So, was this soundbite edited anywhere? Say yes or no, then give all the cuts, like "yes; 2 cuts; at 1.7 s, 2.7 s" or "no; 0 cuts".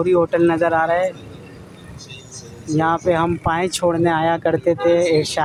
no; 0 cuts